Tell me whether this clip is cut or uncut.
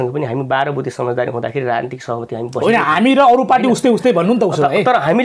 uncut